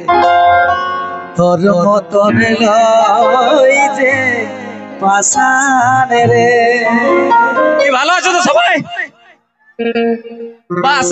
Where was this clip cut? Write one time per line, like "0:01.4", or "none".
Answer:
0:07.9